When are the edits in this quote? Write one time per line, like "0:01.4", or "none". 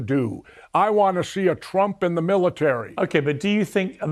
0:02.9